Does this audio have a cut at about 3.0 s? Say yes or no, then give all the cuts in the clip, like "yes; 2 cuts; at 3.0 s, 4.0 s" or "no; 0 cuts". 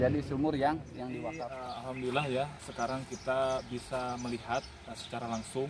no; 1 cut; at 1.2 s